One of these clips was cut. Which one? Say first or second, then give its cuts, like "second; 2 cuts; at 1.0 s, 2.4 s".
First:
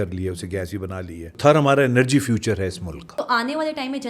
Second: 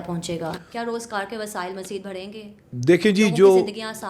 first; 2 cuts; at 1.4 s, 3.0 s